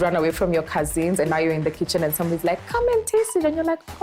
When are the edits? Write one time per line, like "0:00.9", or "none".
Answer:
none